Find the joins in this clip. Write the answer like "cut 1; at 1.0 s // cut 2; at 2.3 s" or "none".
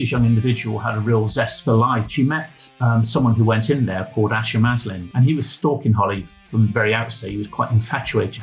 cut 1; at 2.1 s // cut 2; at 5.0 s

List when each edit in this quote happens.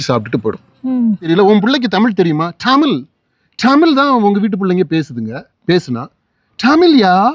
cut 1; at 1.3 s

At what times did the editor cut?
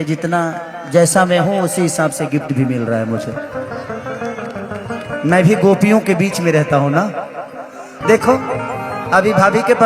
cut 1; at 7.9 s

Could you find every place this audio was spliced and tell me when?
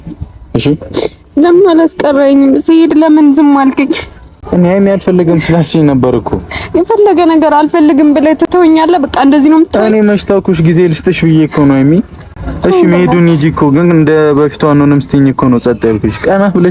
none

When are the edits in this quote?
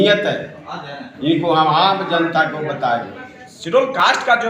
cut 1; at 3.3 s

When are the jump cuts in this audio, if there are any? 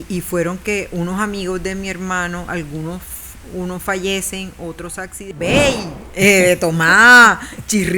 cut 1; at 5.3 s

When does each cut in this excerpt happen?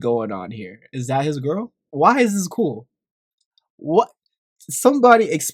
none

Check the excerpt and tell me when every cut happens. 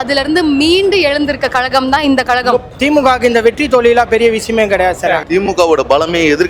cut 1; at 2.7 s // cut 2; at 5.2 s

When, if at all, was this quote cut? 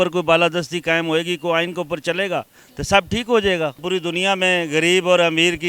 cut 1; at 3.8 s

